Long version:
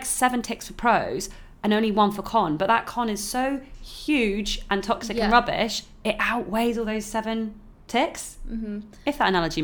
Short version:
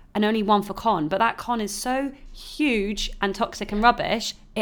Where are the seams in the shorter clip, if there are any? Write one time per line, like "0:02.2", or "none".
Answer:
none